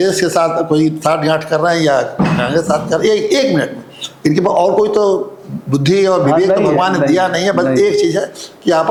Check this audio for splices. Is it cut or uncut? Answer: uncut